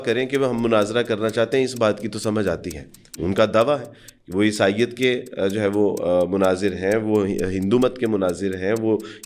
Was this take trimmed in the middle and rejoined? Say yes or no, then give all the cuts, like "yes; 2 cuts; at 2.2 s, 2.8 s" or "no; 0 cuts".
no; 0 cuts